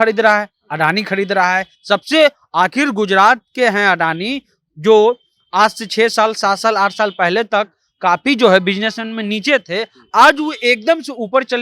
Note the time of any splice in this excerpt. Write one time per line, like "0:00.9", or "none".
none